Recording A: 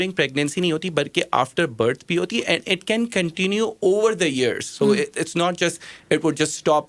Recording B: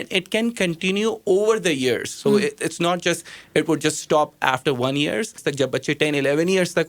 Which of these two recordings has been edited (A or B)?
B